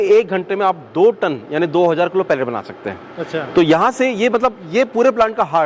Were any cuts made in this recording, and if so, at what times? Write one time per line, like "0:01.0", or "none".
none